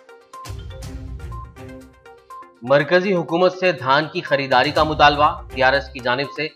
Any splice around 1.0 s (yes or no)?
no